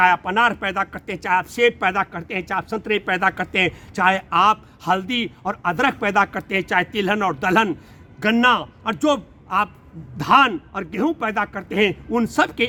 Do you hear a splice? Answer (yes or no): no